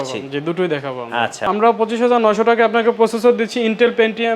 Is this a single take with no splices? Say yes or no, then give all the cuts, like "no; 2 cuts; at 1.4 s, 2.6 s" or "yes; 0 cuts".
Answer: no; 1 cut; at 1.4 s